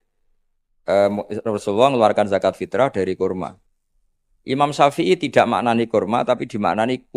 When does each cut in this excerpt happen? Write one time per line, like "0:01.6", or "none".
none